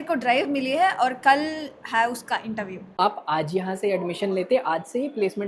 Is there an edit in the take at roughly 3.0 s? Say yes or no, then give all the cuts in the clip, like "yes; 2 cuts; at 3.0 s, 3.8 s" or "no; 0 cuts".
yes; 1 cut; at 3.0 s